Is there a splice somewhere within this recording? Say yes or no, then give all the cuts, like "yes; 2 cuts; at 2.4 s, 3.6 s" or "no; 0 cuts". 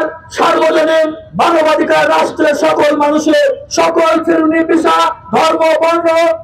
no; 0 cuts